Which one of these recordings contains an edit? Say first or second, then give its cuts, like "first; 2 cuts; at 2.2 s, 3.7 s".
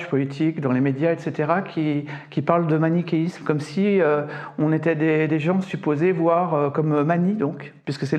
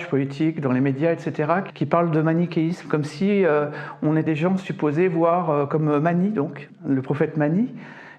second; 3 cuts; at 1.7 s, 4.3 s, 6.7 s